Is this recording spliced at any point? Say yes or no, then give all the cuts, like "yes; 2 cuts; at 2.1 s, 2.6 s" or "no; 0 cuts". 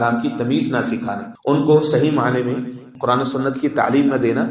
yes; 2 cuts; at 1.3 s, 2.9 s